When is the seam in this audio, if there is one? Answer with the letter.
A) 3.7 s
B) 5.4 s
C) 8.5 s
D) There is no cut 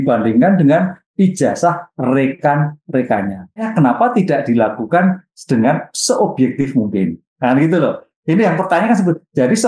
A